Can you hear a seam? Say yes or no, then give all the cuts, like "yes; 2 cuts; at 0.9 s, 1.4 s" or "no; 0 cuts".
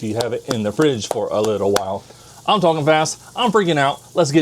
yes; 1 cut; at 2.3 s